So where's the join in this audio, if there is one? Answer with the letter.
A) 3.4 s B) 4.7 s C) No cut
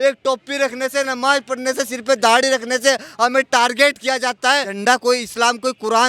B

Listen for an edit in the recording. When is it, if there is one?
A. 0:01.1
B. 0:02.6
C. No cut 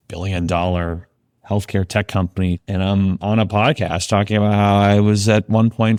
C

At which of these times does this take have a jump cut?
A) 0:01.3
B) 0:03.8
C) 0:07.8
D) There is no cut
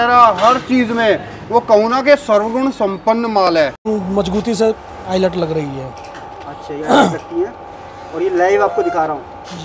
B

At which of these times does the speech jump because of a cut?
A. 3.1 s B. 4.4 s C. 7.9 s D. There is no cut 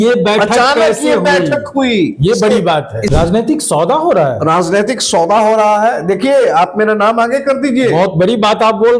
A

